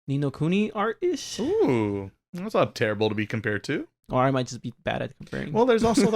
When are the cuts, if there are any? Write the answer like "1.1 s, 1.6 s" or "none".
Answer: 4.0 s